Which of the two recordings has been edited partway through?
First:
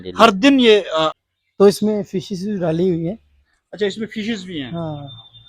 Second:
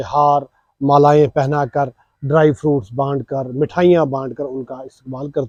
first; 1 cut; at 1.2 s

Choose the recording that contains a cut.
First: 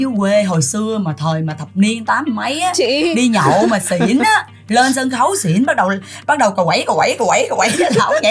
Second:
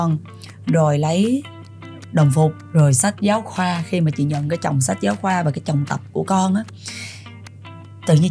second; 1 cut; at 2.6 s

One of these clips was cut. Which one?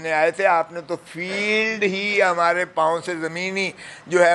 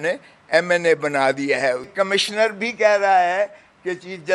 second; 1 cut; at 1.9 s

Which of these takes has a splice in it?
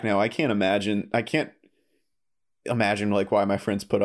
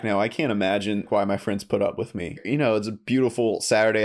second; 2 cuts; at 1.1 s, 2.4 s

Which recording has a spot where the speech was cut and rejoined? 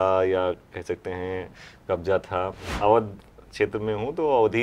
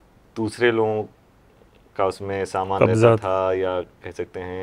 first; 1 cut; at 2.6 s

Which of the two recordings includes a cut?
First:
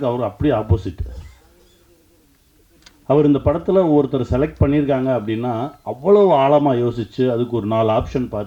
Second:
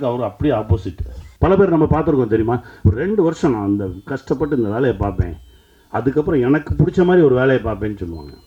second; 1 cut; at 1.2 s

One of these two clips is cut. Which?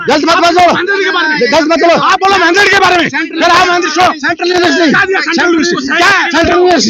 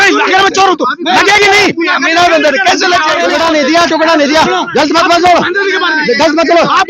second; 1 cut; at 3.2 s

